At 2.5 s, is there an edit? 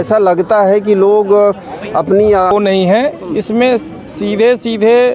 yes; 1 cut; at 2.5 s

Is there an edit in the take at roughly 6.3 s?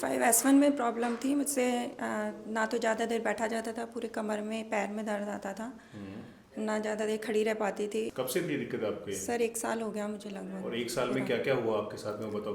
no; 0 cuts

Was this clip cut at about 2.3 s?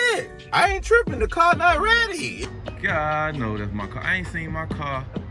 yes; 1 cut; at 2.3 s

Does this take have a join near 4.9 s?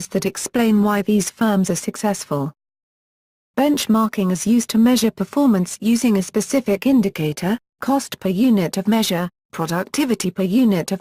yes; 1 cut; at 4.9 s

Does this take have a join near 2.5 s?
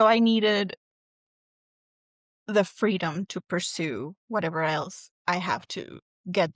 no; 1 cut; at 5.1 s

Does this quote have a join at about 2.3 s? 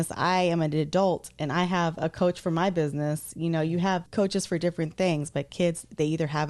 no; 1 cut; at 4.1 s

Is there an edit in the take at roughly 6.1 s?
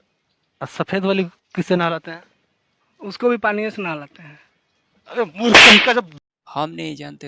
yes; 1 cut; at 6.1 s

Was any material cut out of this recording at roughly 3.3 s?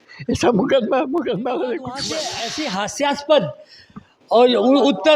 no; 1 cut; at 2.1 s

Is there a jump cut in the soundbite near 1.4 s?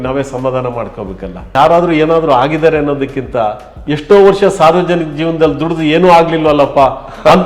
yes; 1 cut; at 1.4 s

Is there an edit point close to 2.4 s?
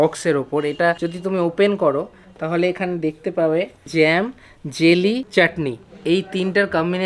no; 3 cuts; at 1.1 s, 3.9 s, 5.3 s

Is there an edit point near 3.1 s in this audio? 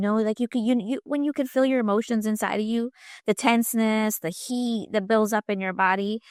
no; 0 cuts

